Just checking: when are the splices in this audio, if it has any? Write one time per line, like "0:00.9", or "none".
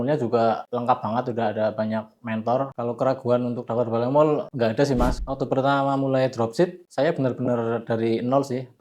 0:02.7
0:05.2